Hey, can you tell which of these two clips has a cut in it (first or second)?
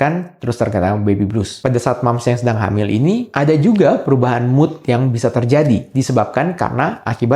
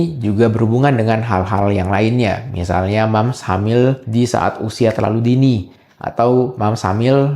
first